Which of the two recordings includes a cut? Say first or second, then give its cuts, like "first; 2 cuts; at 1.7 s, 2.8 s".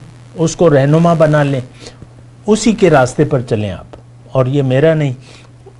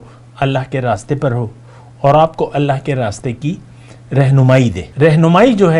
second; 1 cut; at 4.8 s